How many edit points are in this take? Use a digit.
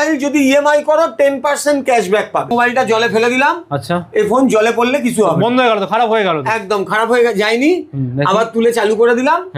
1